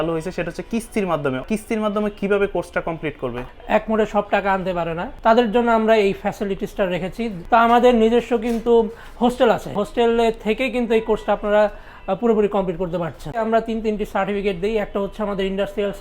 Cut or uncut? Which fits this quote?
cut